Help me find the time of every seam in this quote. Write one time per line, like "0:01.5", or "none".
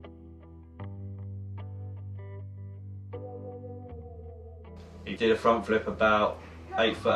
0:03.3